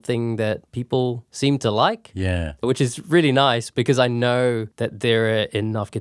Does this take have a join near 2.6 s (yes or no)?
yes